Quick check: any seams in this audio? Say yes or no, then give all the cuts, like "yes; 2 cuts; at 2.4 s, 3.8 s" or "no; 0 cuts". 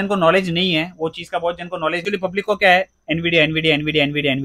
yes; 1 cut; at 2.0 s